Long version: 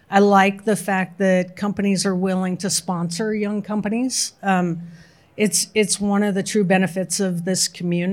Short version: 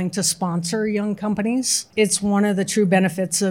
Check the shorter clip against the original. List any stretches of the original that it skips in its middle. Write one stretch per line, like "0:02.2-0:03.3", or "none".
0:04.3-0:05.6